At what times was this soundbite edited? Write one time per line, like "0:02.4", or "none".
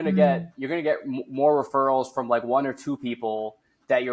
none